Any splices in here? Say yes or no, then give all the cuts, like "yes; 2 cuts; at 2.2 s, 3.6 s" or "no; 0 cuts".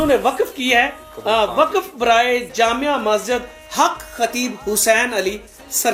no; 0 cuts